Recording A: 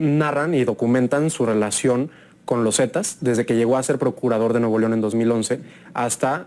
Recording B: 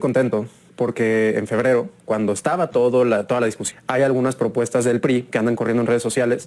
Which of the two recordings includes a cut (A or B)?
B